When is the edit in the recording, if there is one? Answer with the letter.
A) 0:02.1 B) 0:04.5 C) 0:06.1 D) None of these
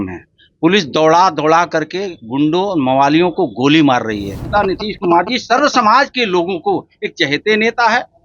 B